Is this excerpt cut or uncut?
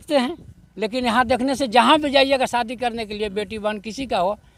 uncut